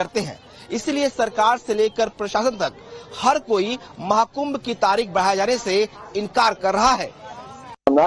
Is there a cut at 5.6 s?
yes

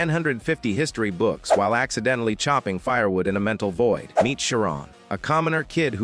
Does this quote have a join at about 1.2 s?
no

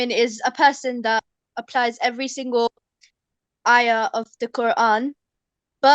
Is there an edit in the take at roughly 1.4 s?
yes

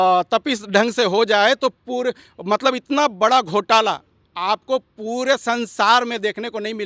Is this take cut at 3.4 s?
no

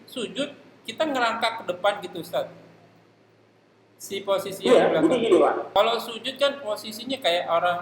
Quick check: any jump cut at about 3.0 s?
no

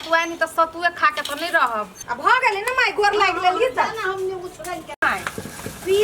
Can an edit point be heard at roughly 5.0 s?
yes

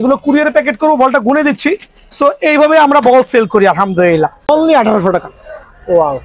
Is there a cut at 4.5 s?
yes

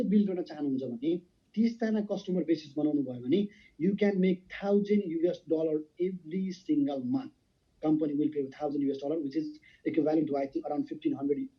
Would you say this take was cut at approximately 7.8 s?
no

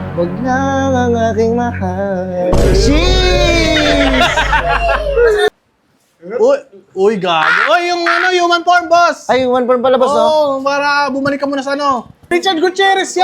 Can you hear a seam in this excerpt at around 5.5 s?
yes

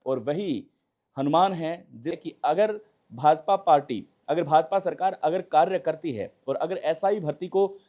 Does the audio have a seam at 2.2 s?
yes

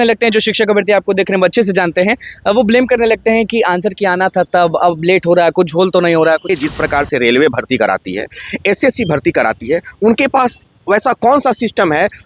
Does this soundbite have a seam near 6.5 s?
yes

